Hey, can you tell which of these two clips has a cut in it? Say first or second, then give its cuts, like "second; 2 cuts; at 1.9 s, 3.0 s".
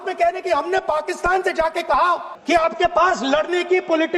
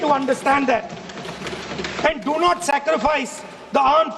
first; 1 cut; at 2.3 s